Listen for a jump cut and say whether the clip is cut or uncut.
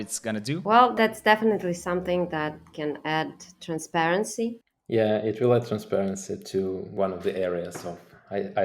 cut